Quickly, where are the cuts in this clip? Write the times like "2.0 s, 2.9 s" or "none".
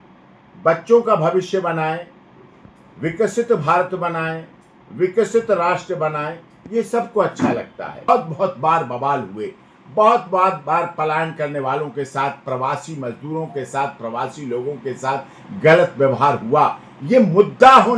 8.1 s